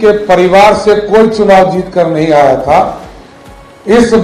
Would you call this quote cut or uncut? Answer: uncut